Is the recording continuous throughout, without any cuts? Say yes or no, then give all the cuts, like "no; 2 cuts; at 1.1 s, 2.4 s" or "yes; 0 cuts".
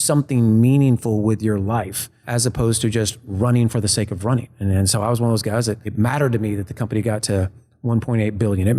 no; 2 cuts; at 2.2 s, 5.9 s